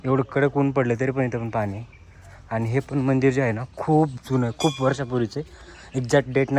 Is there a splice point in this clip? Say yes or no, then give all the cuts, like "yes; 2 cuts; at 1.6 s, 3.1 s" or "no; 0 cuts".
no; 0 cuts